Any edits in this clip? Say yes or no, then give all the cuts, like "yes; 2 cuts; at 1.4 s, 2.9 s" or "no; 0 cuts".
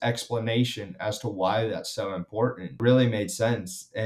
yes; 1 cut; at 2.8 s